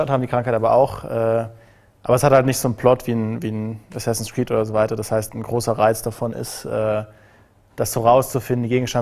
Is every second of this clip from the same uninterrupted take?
yes; 0 cuts

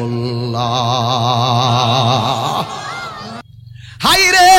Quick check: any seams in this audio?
yes; 1 cut; at 3.4 s

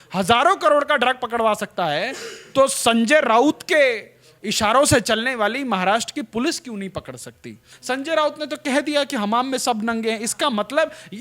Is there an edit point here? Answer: yes; 1 cut; at 7.7 s

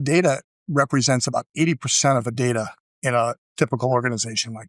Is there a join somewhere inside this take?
yes; 1 cut; at 2.4 s

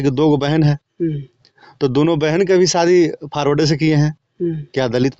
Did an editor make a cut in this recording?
no; 0 cuts

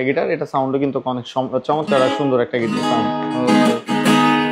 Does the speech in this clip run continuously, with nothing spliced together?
yes; 0 cuts

